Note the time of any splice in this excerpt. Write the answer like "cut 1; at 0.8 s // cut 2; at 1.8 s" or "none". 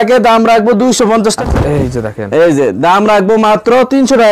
cut 1; at 1.4 s